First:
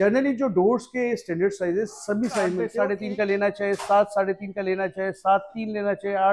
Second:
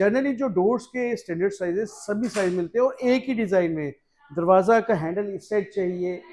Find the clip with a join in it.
first; 1 cut; at 2.7 s

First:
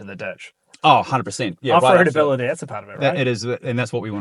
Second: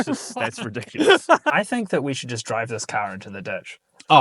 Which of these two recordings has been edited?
second; 1 cut; at 1.5 s

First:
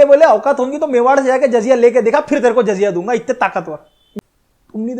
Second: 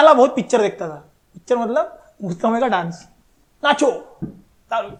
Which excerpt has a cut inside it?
first; 1 cut; at 4.0 s

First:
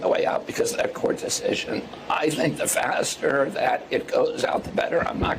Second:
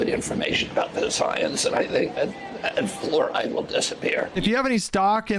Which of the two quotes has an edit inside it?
second; 1 cut; at 4.3 s

